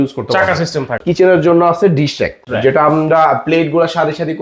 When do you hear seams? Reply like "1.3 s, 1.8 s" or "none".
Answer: 1.0 s, 2.4 s